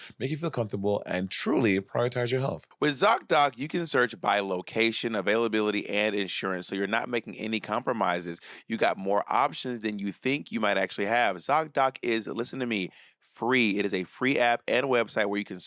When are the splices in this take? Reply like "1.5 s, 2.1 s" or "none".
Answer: none

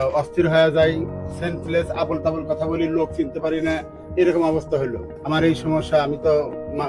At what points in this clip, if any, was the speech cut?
5.0 s

